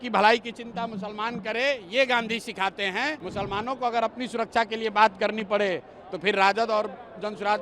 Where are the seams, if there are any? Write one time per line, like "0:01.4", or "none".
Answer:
0:03.2

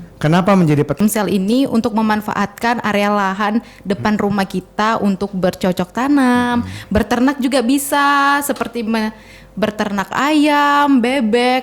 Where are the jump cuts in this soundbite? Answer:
0:01.0

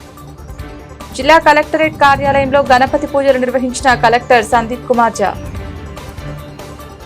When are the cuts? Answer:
0:01.1

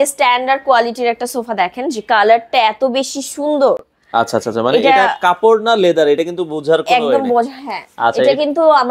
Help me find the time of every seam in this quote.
none

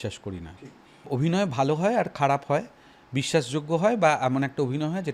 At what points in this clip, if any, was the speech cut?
0:00.9

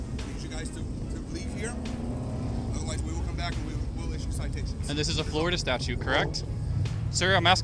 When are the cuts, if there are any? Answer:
none

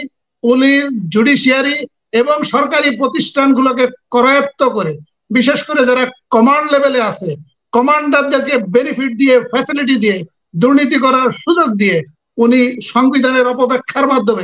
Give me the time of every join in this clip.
none

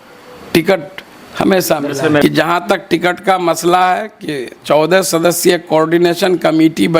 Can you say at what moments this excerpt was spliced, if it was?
0:02.2

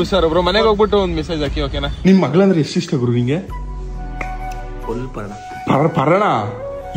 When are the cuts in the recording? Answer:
0:01.8

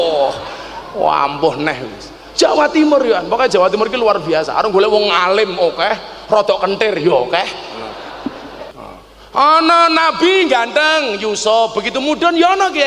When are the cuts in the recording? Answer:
0:08.7

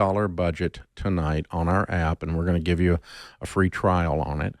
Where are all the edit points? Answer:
none

